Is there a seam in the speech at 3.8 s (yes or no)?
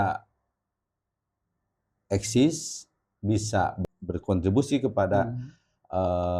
yes